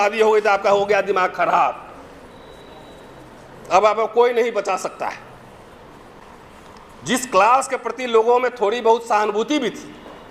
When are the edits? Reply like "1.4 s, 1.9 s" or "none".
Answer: 6.2 s